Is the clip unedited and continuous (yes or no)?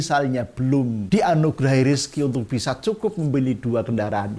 no